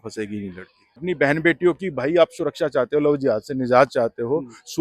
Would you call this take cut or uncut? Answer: cut